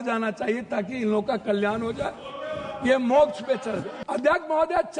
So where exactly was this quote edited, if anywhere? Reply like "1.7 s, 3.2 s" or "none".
3.9 s